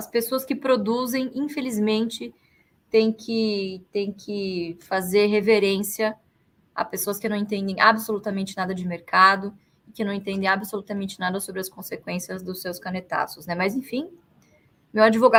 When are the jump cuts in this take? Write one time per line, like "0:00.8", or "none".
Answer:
none